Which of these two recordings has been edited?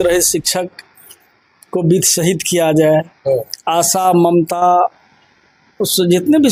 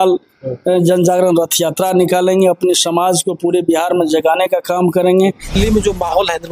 second; 1 cut; at 5.6 s

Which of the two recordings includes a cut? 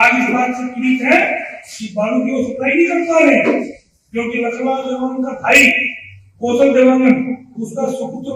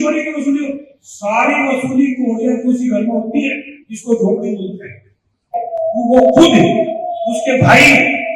second; 1 cut; at 5.5 s

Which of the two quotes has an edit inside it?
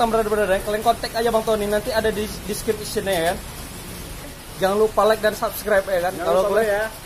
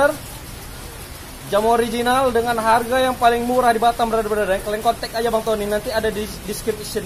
first; 1 cut; at 4.4 s

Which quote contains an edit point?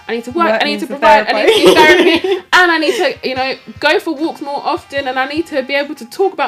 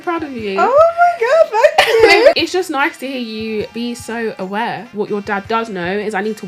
second; 3 cuts; at 2.3 s, 3.7 s, 4.9 s

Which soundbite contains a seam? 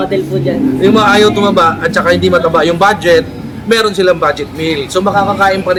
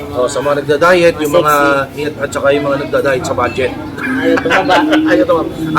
second; 1 cut; at 2.1 s

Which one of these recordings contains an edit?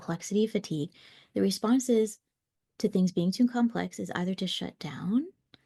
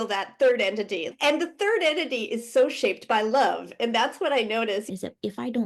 second; 2 cuts; at 1.1 s, 4.9 s

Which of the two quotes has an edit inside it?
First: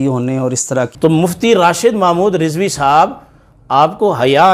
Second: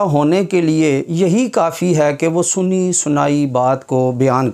first; 1 cut; at 0.9 s

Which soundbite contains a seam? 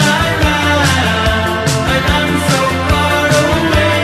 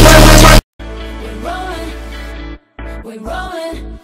second; 1 cut; at 2.9 s

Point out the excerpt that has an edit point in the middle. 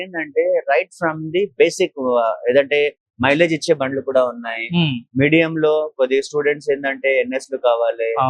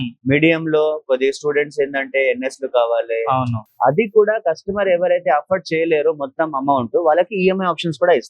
second; 1 cut; at 3.6 s

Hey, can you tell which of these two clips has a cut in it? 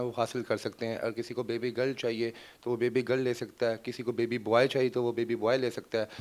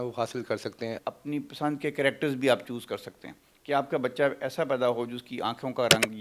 second; 1 cut; at 1.0 s

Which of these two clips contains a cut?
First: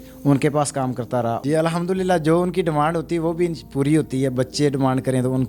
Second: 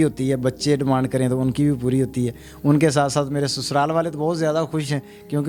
first; 1 cut; at 1.4 s

